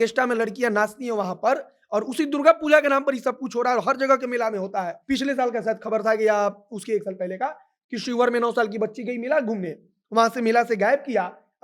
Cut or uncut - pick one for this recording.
cut